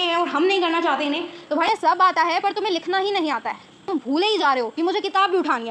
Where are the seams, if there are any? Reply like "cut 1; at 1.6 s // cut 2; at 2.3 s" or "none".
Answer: cut 1; at 1.7 s // cut 2; at 3.9 s